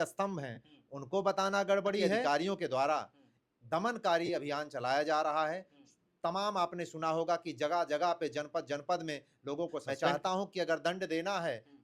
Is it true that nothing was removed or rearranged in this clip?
no; 2 cuts; at 2.2 s, 9.8 s

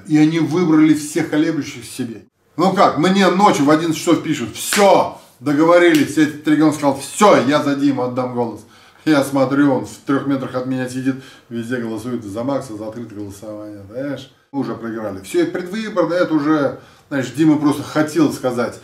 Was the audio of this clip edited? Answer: yes; 2 cuts; at 2.2 s, 14.6 s

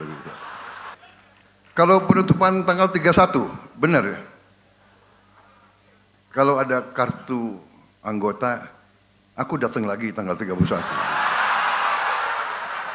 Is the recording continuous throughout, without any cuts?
no; 1 cut; at 1.0 s

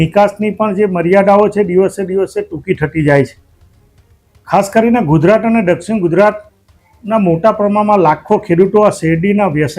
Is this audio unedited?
yes; 0 cuts

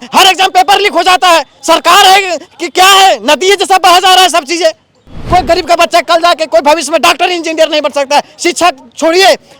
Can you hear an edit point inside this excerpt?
yes; 2 cuts; at 1.5 s, 5.2 s

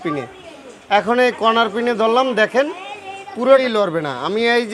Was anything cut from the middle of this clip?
yes; 1 cut; at 3.6 s

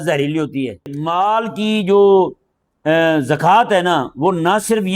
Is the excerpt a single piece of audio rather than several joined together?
no; 1 cut; at 1.0 s

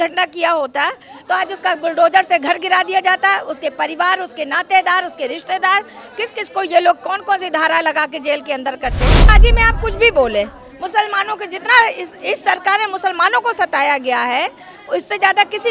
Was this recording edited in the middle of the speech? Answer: yes; 1 cut; at 9.3 s

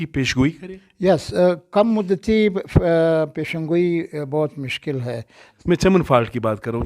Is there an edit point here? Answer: yes; 1 cut; at 5.5 s

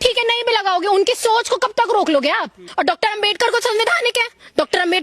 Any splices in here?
yes; 1 cut; at 2.6 s

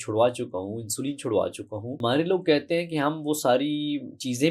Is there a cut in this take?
yes; 1 cut; at 1.8 s

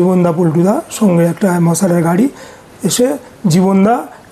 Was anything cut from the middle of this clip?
yes; 1 cut; at 2.5 s

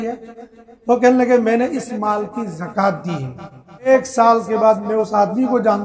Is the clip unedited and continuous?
no; 1 cut; at 3.9 s

